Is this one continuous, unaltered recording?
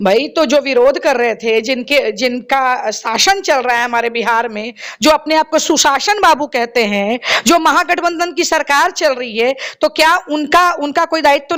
yes; 0 cuts

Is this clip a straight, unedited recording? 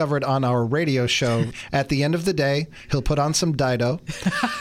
no; 1 cut; at 1.6 s

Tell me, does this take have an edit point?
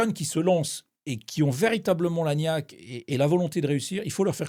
no; 0 cuts

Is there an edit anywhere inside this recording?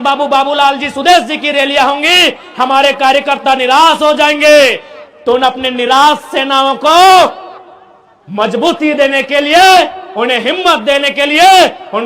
no; 0 cuts

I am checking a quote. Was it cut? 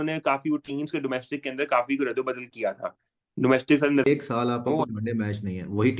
yes; 1 cut; at 4.1 s

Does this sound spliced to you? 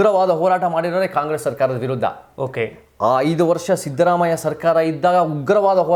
no; 0 cuts

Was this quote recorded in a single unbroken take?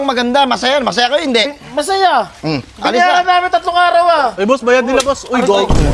yes; 0 cuts

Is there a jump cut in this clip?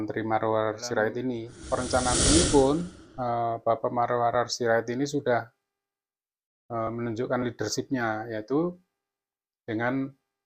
yes; 1 cut; at 1.5 s

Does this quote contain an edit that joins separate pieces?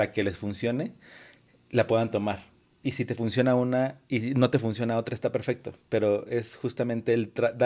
no; 0 cuts

